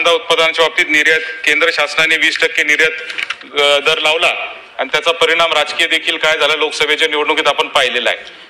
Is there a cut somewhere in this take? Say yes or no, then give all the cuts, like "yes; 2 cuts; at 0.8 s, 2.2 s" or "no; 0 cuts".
no; 0 cuts